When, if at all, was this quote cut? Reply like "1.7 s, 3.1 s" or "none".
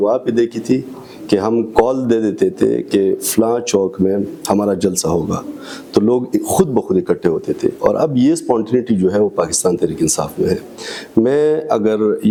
none